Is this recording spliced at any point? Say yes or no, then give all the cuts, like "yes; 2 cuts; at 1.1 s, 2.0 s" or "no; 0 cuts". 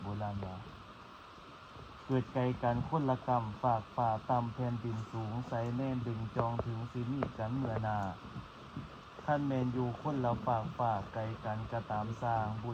no; 0 cuts